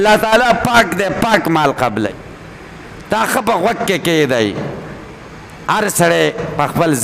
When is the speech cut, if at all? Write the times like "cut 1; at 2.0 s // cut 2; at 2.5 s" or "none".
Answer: cut 1; at 2.1 s